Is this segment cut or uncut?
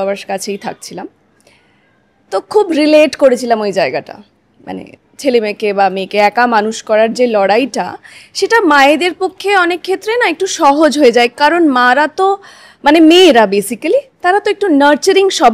uncut